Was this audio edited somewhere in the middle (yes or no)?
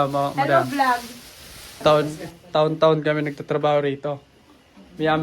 yes